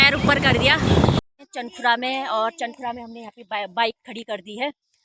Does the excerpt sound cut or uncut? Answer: cut